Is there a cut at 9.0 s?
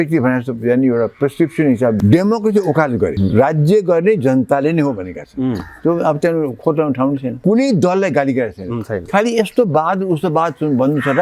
no; 3 cuts; at 2.0 s, 3.2 s, 7.3 s

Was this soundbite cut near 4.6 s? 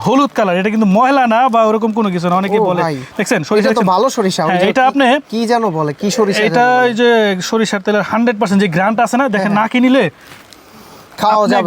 no; 0 cuts

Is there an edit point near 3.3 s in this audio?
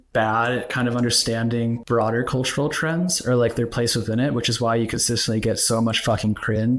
no; 1 cut; at 1.8 s

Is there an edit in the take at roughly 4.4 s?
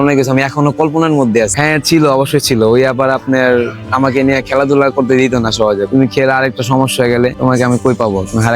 no; 3 cuts; at 1.5 s, 5.9 s, 7.4 s

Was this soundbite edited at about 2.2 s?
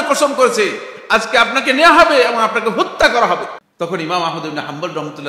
no; 1 cut; at 3.6 s

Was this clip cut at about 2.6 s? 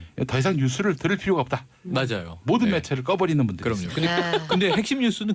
yes; 1 cut; at 2.6 s

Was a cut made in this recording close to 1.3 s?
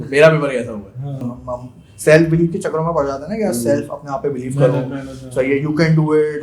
yes; 1 cut; at 1.3 s

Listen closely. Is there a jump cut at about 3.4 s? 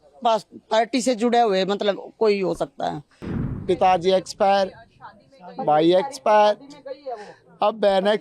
yes; 1 cut; at 3.4 s

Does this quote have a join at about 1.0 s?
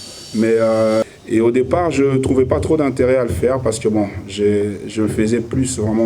yes; 1 cut; at 1.0 s

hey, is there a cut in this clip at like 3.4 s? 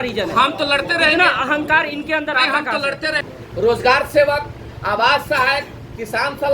yes; 1 cut; at 3.4 s

